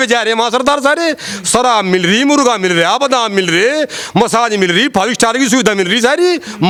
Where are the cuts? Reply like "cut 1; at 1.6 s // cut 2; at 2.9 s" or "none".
none